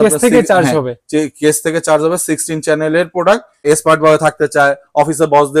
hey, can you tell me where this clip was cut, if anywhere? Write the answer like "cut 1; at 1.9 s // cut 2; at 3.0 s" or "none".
cut 1; at 3.6 s